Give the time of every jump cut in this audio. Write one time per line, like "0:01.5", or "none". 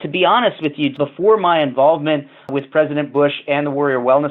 0:00.9
0:02.5